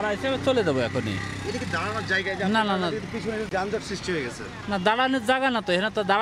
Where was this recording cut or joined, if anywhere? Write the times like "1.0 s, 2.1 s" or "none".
none